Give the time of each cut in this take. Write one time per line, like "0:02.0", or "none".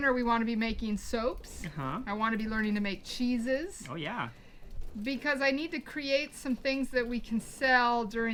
none